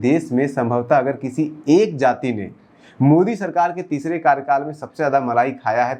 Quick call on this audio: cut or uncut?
uncut